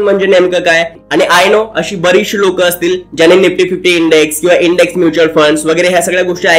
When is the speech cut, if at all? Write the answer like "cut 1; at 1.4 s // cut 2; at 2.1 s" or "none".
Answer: cut 1; at 1.0 s